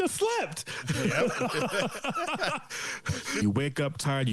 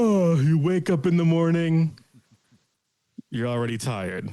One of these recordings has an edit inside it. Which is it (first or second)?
first